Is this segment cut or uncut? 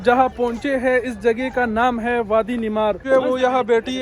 cut